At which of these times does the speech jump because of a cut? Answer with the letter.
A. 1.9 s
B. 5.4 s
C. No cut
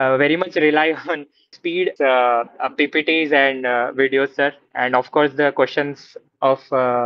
A